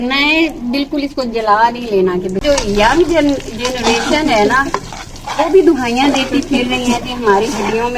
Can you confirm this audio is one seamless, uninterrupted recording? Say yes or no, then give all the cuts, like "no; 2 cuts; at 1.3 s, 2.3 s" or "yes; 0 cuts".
no; 1 cut; at 2.4 s